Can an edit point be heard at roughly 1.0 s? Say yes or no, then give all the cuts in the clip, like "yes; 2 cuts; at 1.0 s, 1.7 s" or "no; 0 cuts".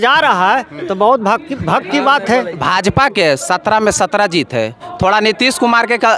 no; 2 cuts; at 2.6 s, 4.8 s